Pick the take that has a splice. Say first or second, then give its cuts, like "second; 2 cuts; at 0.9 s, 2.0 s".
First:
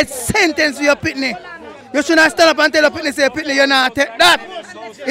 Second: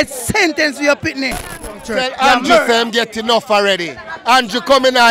second; 1 cut; at 1.8 s